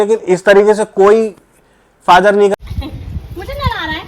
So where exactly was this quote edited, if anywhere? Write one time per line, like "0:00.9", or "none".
0:02.6